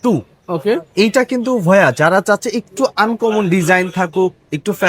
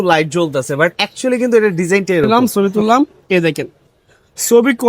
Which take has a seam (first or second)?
second